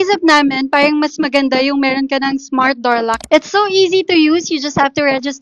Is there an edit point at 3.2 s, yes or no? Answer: yes